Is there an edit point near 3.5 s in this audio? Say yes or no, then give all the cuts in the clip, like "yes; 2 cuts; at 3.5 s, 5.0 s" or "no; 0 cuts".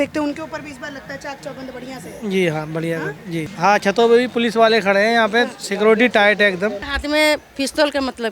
yes; 2 cuts; at 3.5 s, 6.9 s